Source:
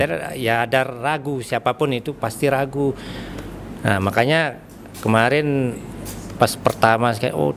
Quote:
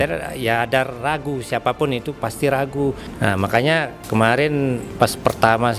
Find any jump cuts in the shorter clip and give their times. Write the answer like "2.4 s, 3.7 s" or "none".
3.1 s, 4.0 s, 4.9 s